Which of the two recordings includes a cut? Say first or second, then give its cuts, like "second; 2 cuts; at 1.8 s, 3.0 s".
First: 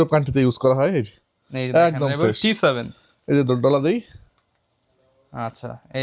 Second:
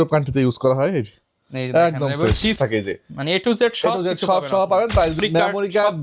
second; 2 cuts; at 2.6 s, 5.2 s